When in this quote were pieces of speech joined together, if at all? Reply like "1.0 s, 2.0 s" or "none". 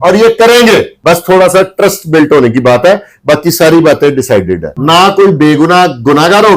0.9 s, 4.7 s